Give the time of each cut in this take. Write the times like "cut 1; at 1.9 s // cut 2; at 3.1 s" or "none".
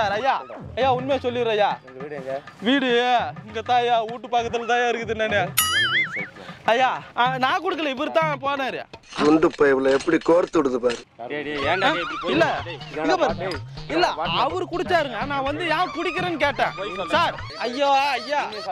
cut 1; at 7.1 s // cut 2; at 17.5 s